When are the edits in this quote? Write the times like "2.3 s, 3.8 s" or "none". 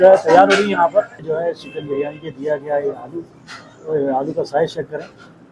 1.2 s